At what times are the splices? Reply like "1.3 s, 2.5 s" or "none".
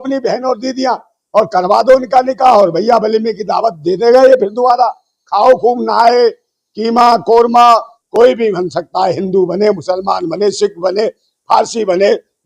8.0 s